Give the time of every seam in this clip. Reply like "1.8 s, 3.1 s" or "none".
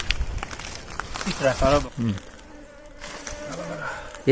1.8 s